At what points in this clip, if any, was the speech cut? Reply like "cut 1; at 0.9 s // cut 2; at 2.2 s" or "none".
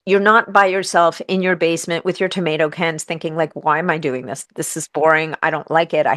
none